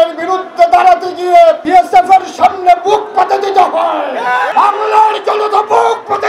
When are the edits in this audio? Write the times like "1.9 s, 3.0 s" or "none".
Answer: 1.6 s, 4.5 s